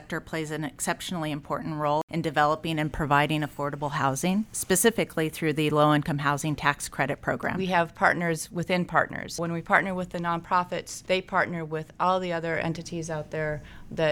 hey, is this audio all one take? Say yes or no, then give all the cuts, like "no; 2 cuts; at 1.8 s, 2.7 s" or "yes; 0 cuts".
no; 5 cuts; at 2.0 s, 4.5 s, 7.5 s, 9.4 s, 10.9 s